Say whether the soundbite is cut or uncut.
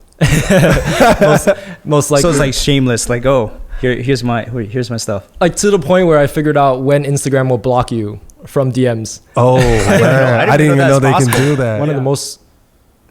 cut